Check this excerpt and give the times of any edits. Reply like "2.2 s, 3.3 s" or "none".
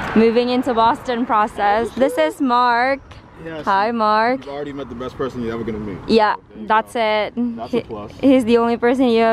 none